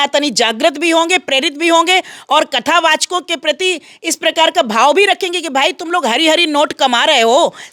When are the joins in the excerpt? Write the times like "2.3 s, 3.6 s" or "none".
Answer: none